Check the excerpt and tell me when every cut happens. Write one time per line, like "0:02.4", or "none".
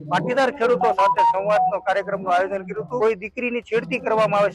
0:02.9